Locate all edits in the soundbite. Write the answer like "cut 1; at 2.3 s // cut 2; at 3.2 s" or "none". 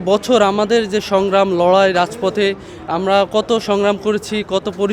none